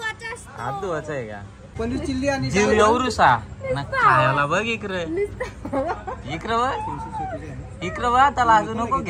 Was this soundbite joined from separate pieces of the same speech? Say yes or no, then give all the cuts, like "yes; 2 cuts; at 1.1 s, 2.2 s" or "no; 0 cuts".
yes; 1 cut; at 1.7 s